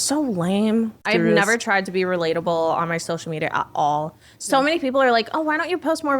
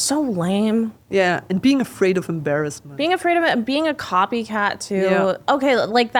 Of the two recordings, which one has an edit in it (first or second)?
first